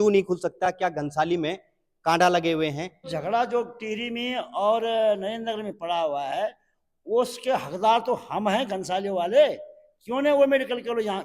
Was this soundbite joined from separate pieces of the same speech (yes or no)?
yes